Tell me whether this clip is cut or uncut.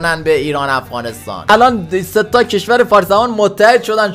cut